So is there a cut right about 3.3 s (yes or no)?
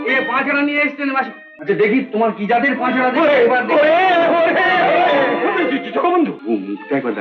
no